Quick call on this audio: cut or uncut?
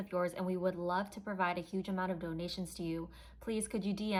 uncut